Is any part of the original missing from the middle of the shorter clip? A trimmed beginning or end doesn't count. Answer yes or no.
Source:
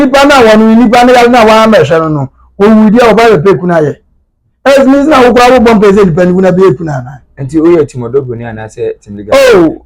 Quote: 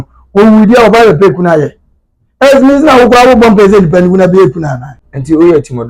no